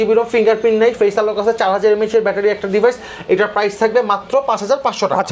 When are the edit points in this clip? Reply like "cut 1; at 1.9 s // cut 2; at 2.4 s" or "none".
none